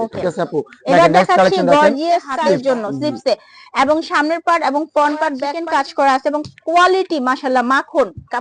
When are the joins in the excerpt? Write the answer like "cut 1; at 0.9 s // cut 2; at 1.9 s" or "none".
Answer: cut 1; at 2.3 s // cut 2; at 5.5 s